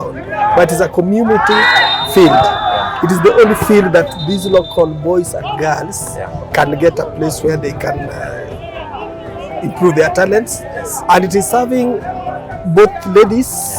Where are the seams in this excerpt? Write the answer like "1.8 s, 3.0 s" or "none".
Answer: none